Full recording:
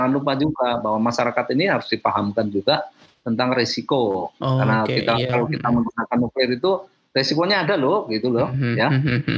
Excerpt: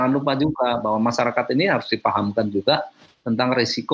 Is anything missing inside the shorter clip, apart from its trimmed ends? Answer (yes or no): no